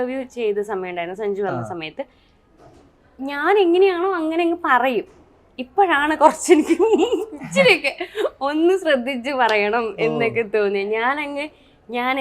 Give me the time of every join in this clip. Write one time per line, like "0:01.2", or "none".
none